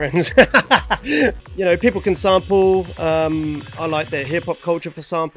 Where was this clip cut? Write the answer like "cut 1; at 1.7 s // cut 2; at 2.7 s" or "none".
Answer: cut 1; at 1.4 s